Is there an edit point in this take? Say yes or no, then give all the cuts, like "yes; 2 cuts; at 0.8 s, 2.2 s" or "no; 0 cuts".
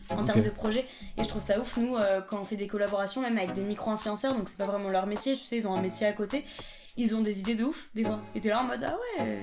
no; 0 cuts